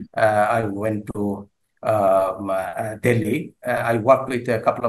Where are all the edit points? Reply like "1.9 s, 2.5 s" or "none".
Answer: none